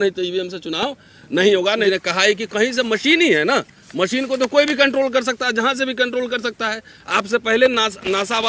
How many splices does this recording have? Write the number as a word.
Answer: one